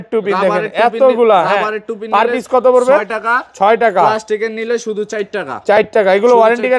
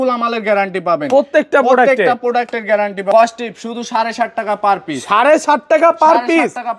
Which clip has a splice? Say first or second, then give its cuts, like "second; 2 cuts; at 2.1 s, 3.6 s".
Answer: second; 1 cut; at 3.1 s